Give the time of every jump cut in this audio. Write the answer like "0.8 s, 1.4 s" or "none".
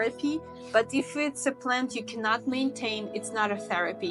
none